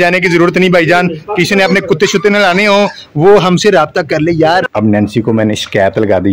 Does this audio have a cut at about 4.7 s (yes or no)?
yes